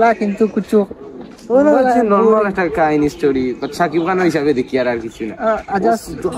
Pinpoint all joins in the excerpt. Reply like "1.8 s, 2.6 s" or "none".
none

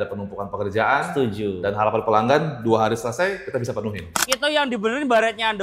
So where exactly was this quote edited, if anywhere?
4.3 s

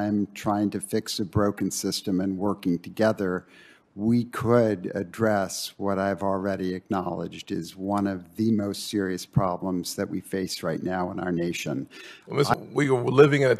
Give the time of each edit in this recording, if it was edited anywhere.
12.5 s

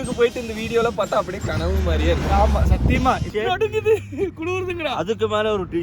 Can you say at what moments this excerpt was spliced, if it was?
3.3 s

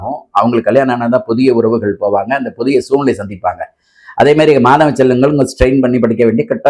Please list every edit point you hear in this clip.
none

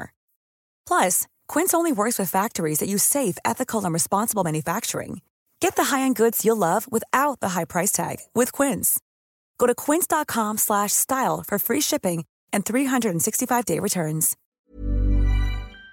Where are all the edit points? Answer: 14.4 s

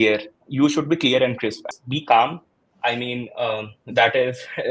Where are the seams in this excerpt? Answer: 1.6 s

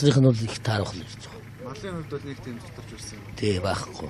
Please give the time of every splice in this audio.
1.1 s

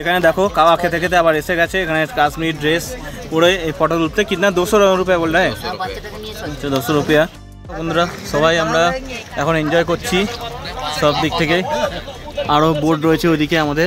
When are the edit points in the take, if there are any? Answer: none

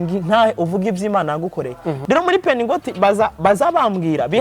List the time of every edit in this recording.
2.0 s

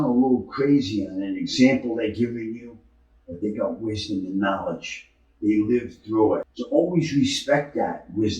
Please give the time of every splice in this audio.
6.5 s

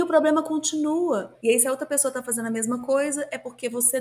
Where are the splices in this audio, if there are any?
1.3 s

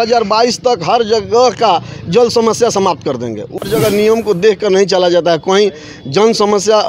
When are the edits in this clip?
3.3 s

